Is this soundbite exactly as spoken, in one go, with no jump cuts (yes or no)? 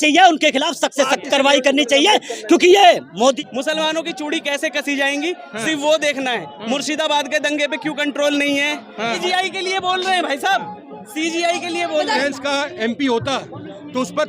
no